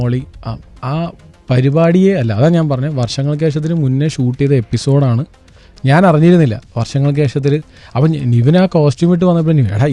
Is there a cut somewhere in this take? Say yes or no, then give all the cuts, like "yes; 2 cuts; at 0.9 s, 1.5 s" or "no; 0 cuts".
no; 0 cuts